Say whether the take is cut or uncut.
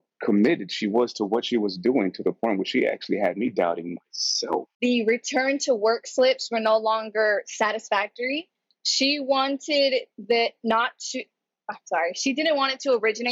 cut